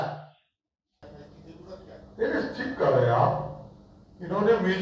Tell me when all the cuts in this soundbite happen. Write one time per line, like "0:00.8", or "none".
0:01.0